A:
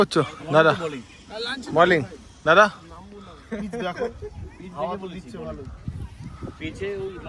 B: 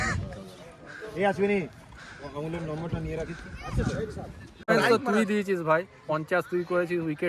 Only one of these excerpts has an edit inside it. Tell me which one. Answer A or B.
B